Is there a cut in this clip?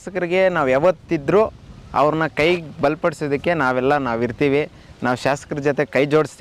no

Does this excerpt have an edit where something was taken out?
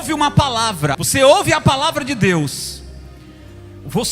yes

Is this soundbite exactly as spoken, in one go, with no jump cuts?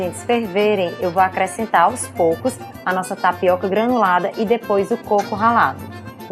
yes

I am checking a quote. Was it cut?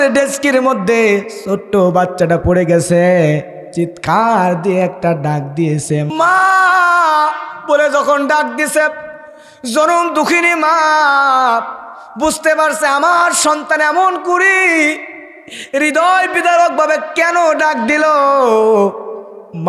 yes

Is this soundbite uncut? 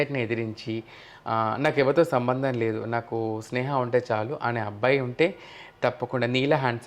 yes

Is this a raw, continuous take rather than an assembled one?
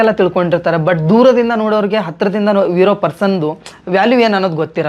yes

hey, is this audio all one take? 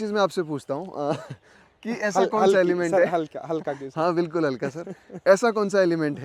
yes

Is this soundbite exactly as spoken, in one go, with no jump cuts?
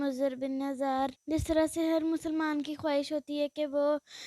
no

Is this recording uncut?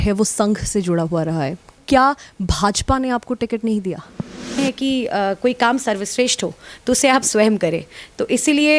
no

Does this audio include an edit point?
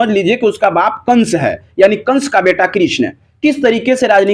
no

